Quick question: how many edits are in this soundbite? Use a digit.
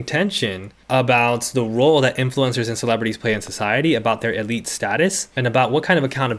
1